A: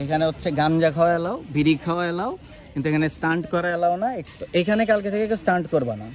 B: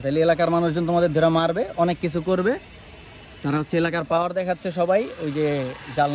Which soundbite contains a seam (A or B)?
A